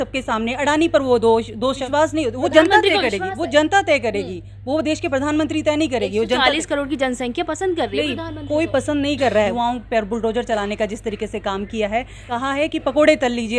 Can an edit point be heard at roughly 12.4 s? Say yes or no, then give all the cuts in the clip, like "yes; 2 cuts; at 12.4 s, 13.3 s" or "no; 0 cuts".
yes; 3 cuts; at 1.8 s, 9.5 s, 12.4 s